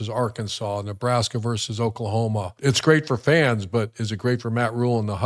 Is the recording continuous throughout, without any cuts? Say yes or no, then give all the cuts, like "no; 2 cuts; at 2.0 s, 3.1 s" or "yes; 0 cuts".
no; 1 cut; at 2.5 s